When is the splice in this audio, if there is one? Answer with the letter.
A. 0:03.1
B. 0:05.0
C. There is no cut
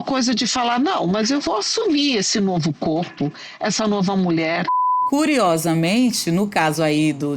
B